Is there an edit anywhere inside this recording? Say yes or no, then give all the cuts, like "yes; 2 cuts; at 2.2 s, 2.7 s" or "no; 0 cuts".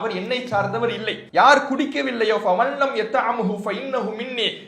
yes; 1 cut; at 1.2 s